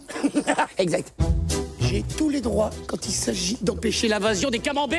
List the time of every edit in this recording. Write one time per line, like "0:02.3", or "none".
none